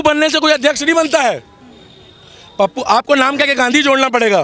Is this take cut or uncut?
uncut